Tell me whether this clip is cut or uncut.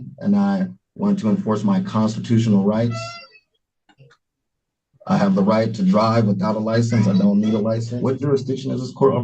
cut